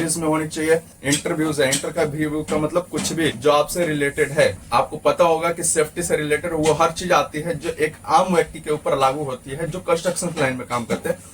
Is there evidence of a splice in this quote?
yes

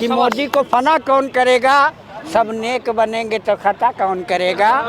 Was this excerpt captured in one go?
yes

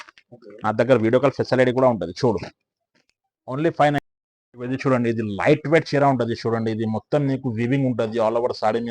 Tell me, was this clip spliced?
yes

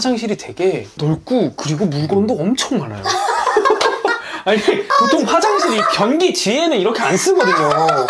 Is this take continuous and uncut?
yes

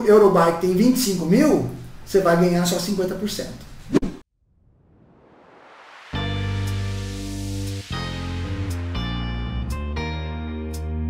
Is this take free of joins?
no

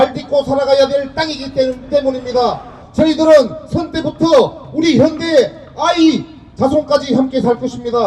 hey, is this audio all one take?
no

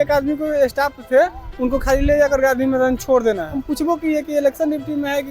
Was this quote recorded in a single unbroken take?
no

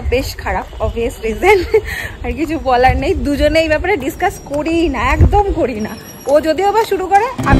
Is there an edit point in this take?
no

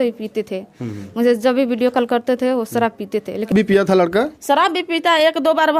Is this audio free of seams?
no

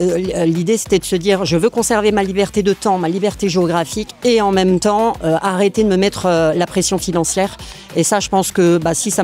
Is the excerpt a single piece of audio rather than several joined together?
yes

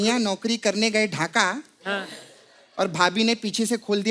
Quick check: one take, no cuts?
yes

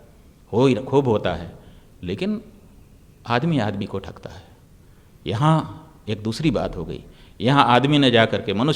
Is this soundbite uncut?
yes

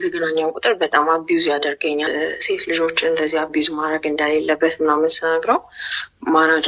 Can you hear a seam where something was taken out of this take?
yes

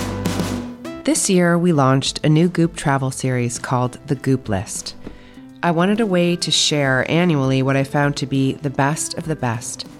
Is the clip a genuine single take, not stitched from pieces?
no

